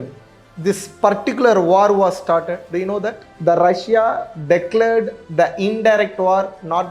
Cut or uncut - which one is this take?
cut